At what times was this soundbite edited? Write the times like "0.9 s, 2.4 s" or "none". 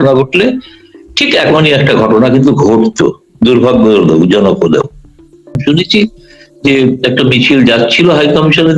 5.6 s